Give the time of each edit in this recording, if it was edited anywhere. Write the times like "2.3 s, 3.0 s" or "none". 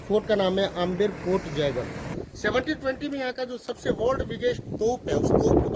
2.2 s

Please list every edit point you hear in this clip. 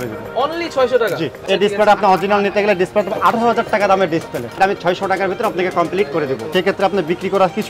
1.4 s, 4.6 s, 6.4 s

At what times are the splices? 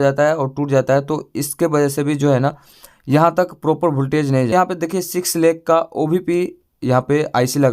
4.5 s

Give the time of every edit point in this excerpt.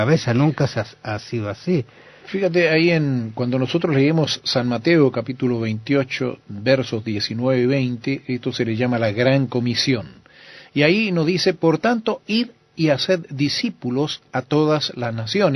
4.2 s

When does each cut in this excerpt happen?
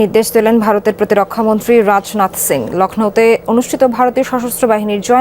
none

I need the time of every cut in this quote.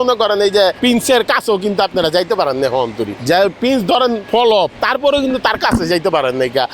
0.8 s, 3.1 s, 4.4 s

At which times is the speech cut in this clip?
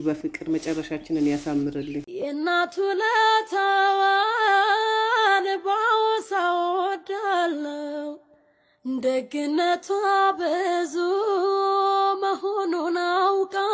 2.0 s

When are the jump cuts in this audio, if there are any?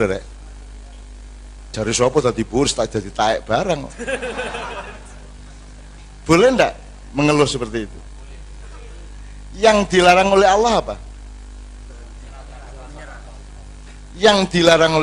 none

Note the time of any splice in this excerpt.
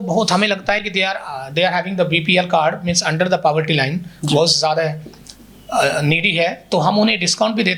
none

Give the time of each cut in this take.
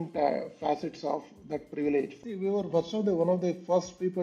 2.2 s

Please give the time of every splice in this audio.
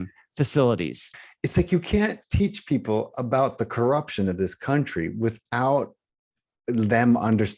1.0 s

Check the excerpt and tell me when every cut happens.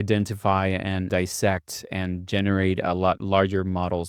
1.1 s, 3.2 s

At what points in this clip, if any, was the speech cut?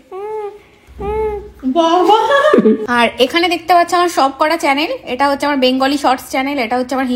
2.8 s

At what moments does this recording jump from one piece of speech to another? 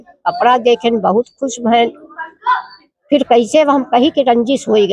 none

